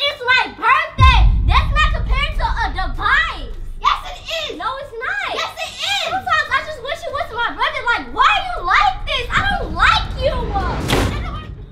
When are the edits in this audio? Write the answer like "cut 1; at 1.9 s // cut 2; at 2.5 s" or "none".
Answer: none